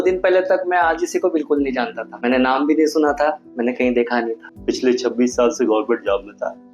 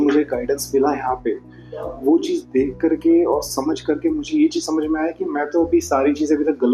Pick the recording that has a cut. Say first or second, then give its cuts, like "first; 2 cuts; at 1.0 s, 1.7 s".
first; 2 cuts; at 2.0 s, 4.5 s